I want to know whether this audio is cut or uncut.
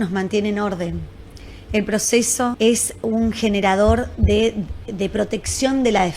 cut